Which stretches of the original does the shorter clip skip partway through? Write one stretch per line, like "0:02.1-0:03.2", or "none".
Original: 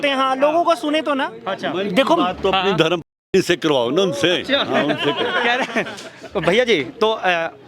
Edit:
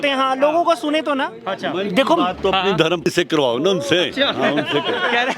0:03.1-0:03.4